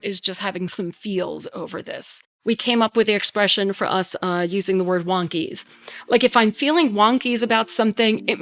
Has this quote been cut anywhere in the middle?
yes; 1 cut; at 2.3 s

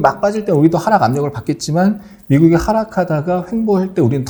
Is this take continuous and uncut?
yes; 0 cuts

